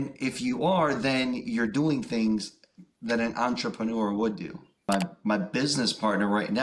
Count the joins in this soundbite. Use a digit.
1